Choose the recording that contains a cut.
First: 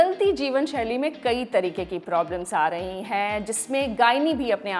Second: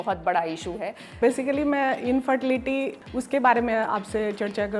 second; 2 cuts; at 1.2 s, 3.0 s

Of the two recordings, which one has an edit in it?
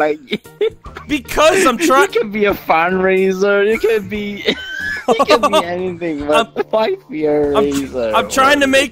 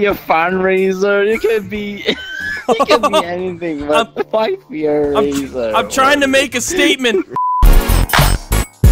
second; 1 cut; at 7.5 s

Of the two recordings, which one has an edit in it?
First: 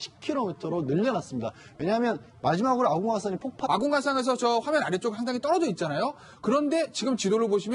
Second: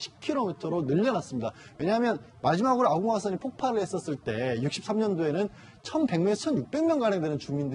second; 1 cut; at 3.6 s

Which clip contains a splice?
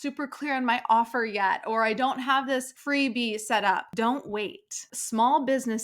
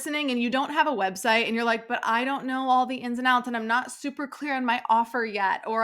first; 3 cuts; at 2.7 s, 3.9 s, 4.9 s

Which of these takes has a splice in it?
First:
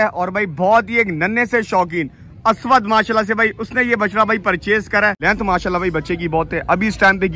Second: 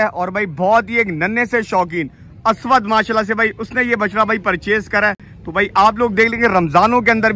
first; 1 cut; at 5.2 s

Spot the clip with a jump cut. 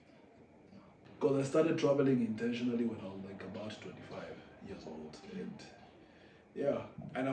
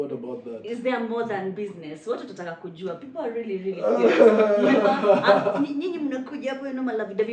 first; 1 cut; at 1.0 s

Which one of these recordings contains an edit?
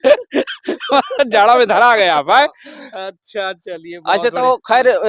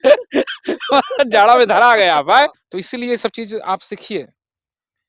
second; 1 cut; at 2.6 s

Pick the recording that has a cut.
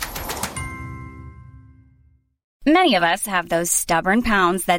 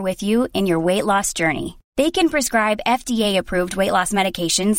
first; 1 cut; at 2.4 s

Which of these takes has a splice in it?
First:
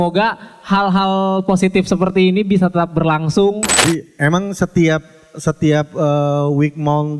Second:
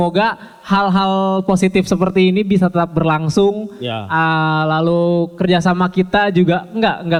first; 1 cut; at 3.8 s

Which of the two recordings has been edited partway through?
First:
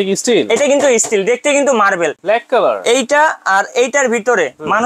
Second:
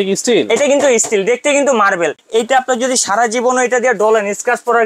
second; 1 cut; at 2.2 s

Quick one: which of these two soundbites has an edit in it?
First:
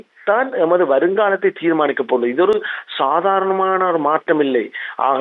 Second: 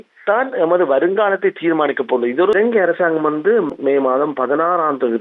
second; 2 cuts; at 2.5 s, 3.7 s

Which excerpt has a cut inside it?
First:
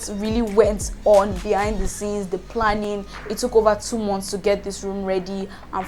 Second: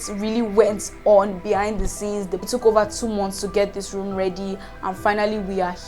second; 1 cut; at 2.4 s

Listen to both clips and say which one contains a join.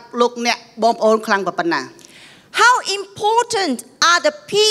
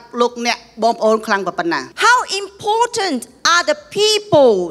second; 1 cut; at 1.9 s

